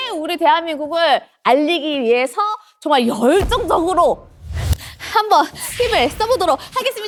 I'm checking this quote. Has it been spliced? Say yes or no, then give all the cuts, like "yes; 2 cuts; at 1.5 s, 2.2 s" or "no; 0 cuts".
no; 0 cuts